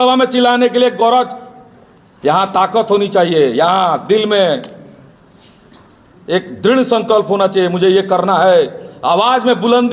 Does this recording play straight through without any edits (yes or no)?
yes